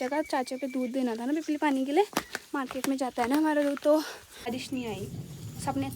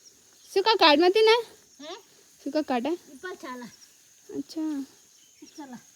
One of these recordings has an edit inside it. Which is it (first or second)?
first